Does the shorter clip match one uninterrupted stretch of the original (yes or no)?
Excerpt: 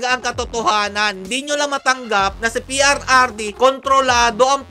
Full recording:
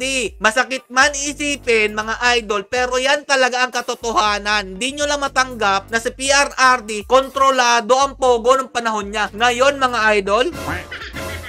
yes